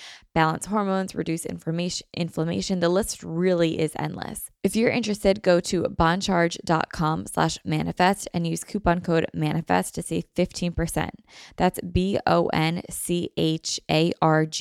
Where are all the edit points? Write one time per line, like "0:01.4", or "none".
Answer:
0:04.4